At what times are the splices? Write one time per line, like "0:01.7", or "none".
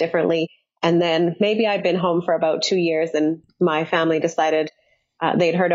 none